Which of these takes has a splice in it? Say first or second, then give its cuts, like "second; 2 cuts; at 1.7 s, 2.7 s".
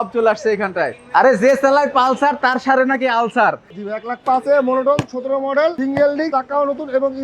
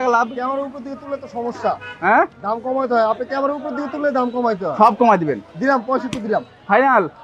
first; 2 cuts; at 1.0 s, 3.7 s